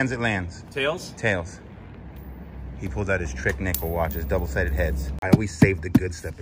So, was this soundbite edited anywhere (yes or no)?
yes